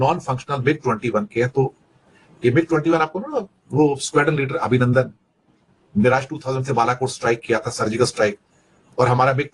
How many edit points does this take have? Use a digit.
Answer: 0